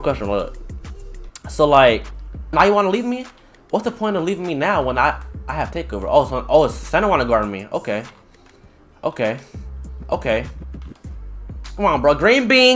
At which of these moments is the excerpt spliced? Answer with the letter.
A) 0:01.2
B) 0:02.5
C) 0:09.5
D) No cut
B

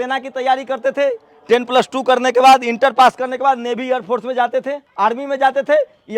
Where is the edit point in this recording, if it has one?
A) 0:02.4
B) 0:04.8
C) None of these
B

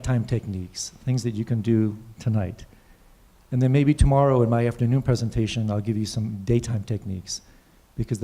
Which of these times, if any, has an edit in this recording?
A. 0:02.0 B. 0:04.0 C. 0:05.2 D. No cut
B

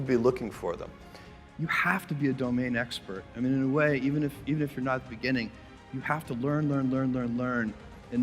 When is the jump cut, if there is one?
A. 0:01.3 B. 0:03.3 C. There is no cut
A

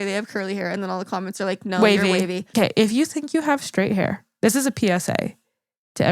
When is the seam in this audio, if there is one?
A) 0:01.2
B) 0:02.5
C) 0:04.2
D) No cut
B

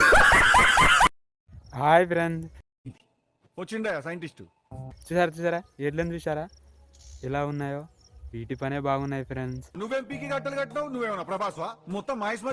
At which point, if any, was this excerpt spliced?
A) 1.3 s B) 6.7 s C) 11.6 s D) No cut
A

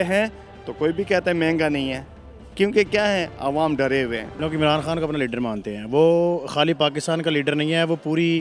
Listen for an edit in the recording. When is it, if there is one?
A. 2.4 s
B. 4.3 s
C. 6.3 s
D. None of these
B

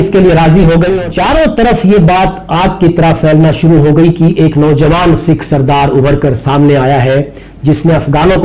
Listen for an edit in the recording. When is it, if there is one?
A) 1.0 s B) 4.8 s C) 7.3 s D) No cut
A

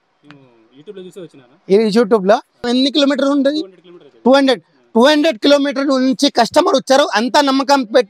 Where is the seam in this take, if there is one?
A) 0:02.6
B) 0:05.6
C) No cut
A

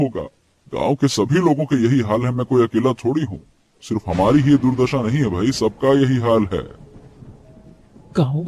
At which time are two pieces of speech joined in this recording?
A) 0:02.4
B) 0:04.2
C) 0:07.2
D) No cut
D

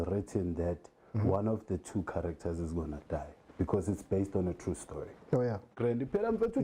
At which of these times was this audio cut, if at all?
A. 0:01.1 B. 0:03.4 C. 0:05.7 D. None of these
C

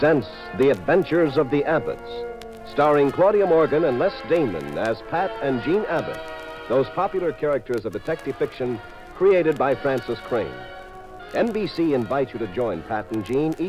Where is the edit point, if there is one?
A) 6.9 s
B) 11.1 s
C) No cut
A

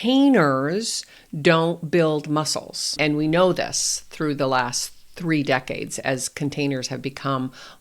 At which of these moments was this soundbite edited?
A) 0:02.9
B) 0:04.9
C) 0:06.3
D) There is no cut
A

